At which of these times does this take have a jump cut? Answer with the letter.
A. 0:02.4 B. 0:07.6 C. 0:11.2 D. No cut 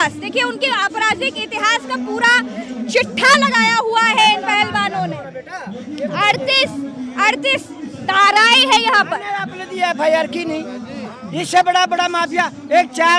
D